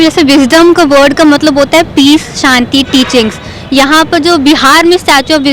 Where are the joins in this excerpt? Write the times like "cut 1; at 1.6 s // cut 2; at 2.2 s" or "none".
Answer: none